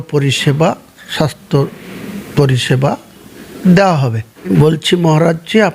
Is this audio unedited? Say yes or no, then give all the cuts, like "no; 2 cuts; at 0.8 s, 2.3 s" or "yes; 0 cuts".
no; 1 cut; at 4.5 s